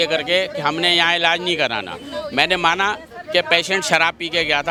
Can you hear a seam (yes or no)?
no